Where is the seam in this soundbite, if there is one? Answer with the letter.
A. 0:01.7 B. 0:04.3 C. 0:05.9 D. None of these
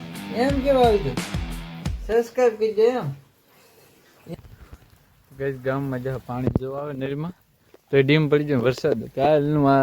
B